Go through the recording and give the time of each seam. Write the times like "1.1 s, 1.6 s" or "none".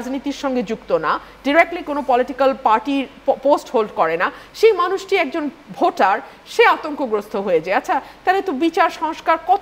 none